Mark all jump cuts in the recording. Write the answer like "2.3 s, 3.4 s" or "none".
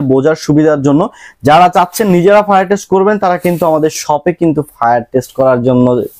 none